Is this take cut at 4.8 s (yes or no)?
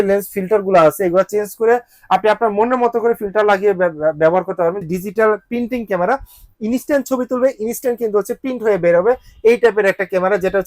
yes